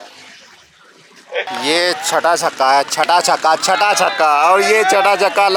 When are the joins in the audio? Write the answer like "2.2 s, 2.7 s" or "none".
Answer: 1.5 s